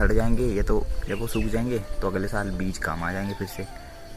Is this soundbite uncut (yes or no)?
no